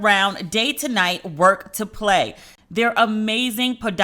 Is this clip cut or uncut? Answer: cut